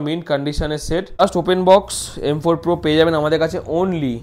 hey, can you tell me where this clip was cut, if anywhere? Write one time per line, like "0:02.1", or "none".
0:01.2